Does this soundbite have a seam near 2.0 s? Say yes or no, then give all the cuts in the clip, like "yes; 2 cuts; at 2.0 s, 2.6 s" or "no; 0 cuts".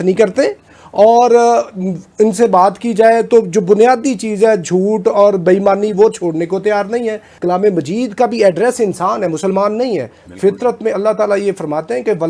no; 1 cut; at 7.3 s